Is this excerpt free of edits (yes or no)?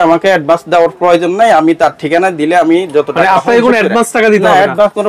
yes